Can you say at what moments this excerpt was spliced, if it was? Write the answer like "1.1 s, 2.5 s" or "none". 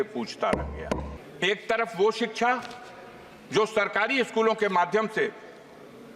1.1 s